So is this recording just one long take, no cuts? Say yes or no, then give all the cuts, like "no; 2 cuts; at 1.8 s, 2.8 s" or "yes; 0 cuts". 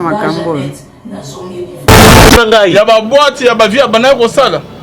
no; 1 cut; at 2.4 s